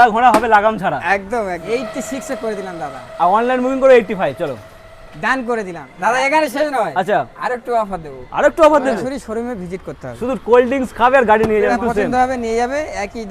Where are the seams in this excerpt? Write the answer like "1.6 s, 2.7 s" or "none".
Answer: 1.6 s, 5.9 s, 9.0 s, 11.7 s